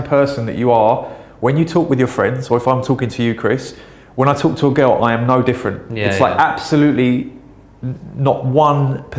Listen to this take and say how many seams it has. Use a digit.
0